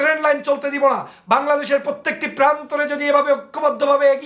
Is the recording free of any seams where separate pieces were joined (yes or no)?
yes